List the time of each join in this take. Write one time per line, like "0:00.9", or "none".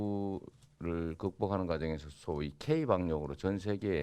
none